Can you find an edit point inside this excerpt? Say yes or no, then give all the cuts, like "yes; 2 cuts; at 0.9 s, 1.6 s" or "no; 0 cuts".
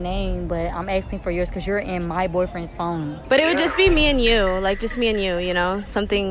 yes; 1 cut; at 3.2 s